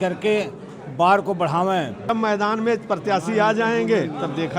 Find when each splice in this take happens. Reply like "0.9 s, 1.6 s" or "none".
2.1 s